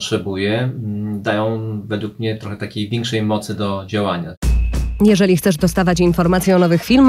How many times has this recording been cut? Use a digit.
1